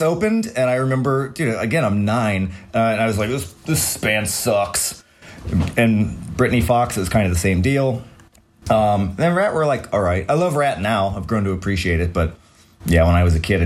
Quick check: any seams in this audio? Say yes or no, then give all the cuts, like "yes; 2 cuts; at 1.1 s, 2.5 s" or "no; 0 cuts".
no; 0 cuts